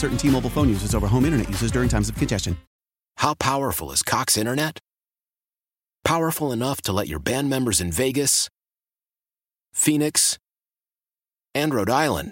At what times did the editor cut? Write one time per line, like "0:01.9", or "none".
0:02.7